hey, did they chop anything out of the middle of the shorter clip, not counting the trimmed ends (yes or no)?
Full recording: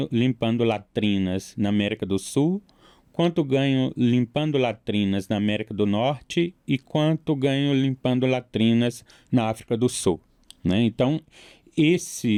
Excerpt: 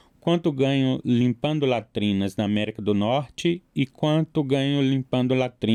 no